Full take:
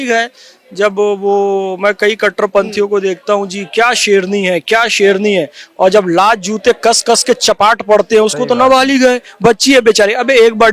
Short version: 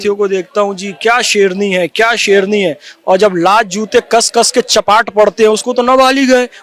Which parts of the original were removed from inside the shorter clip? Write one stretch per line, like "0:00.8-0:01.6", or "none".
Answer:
none